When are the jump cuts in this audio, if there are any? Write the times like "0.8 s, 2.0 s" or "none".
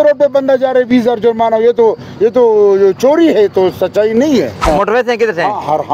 4.6 s